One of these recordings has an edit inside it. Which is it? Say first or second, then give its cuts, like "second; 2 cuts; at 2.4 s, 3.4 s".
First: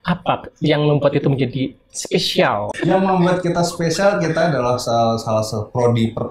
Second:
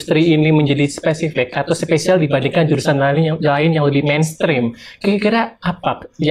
first; 1 cut; at 2.7 s